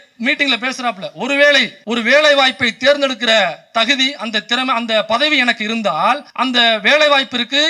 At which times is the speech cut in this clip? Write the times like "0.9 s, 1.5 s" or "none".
1.7 s, 6.3 s

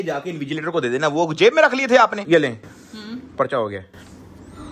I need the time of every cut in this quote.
2.2 s

